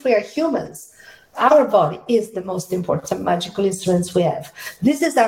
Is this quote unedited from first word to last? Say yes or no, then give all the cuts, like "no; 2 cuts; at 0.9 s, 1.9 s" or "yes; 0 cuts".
no; 1 cut; at 1.2 s